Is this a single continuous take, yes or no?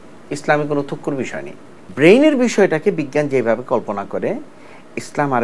no